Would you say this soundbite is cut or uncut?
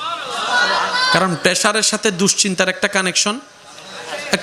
uncut